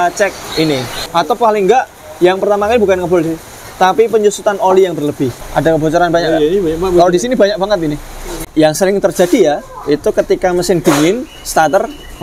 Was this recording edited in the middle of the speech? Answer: yes; 3 cuts; at 1.0 s, 5.4 s, 8.4 s

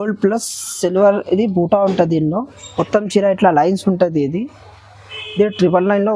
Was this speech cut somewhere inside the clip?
no; 0 cuts

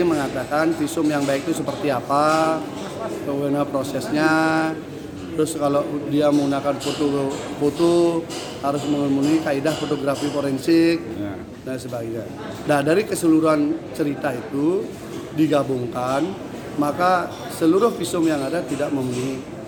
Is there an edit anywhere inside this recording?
no; 0 cuts

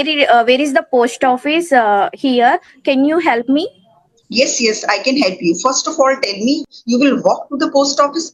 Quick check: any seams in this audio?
no; 0 cuts

